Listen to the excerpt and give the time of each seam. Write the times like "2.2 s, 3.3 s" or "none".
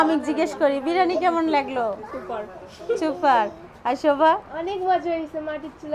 none